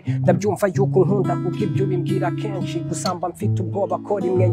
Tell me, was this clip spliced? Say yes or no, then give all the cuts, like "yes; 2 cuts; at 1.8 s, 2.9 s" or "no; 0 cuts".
no; 0 cuts